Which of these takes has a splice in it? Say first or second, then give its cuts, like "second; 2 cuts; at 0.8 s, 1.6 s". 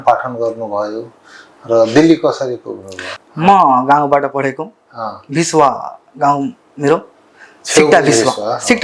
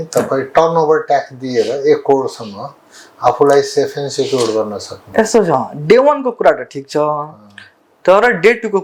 first; 1 cut; at 3.1 s